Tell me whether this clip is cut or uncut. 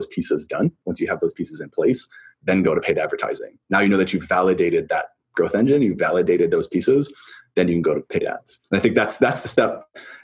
uncut